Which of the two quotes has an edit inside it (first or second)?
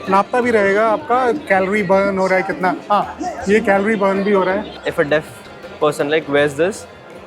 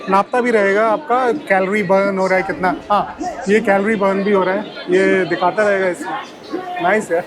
first